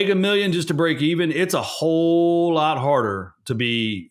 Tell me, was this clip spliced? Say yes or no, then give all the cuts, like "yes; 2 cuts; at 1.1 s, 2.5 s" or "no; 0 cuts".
no; 0 cuts